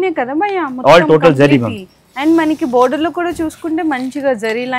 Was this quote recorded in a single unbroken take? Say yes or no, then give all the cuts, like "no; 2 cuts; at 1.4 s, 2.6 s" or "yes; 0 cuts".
yes; 0 cuts